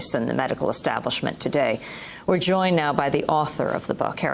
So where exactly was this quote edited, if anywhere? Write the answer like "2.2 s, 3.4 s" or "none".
none